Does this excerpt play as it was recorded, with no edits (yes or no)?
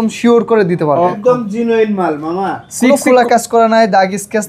no